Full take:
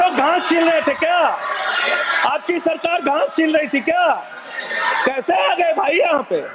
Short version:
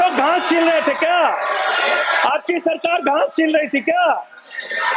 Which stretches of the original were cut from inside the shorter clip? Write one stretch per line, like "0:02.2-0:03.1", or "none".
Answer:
none